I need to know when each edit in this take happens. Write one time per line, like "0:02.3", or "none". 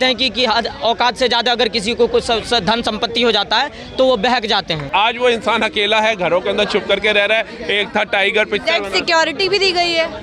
0:04.9